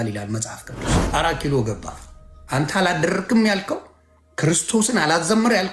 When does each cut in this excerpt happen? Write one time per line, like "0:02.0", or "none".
0:01.0
0:02.4